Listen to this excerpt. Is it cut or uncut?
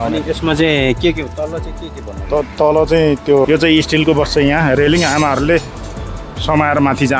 cut